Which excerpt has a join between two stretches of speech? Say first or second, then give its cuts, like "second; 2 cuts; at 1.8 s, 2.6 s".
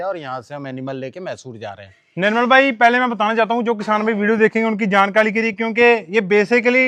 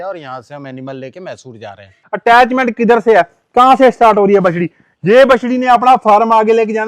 second; 1 cut; at 2.0 s